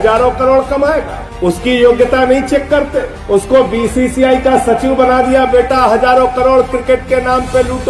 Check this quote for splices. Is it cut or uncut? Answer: uncut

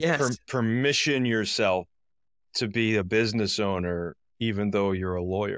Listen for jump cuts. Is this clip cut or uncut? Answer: uncut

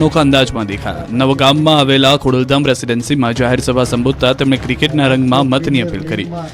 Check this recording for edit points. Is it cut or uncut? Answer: cut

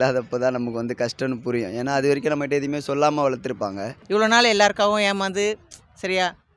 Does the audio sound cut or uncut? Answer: cut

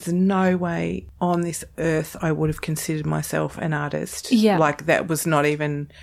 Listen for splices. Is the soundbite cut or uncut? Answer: cut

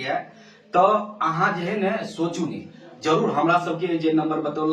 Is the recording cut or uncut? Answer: uncut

